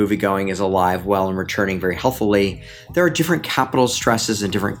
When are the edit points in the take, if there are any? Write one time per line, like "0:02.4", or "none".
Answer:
none